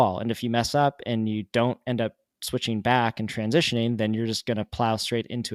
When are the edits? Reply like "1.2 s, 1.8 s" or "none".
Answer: none